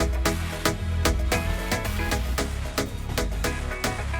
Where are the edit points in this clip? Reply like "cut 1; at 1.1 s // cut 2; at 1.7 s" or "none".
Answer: cut 1; at 3.0 s

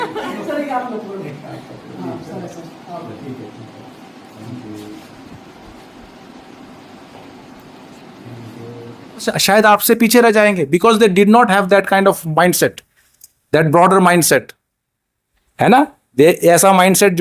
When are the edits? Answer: cut 1; at 9.3 s

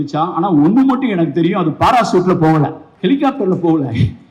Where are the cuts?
cut 1; at 2.8 s

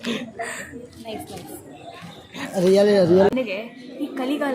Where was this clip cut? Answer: cut 1; at 3.3 s

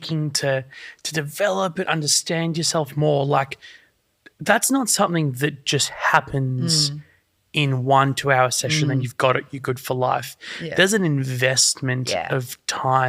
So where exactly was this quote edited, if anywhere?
none

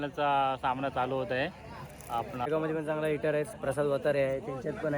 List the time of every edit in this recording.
cut 1; at 2.5 s

